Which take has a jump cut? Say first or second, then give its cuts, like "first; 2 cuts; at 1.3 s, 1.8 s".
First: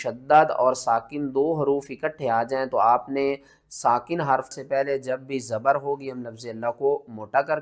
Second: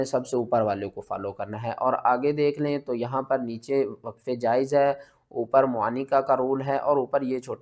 first; 1 cut; at 4.5 s